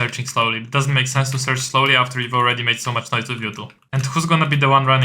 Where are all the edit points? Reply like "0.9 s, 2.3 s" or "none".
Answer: 3.8 s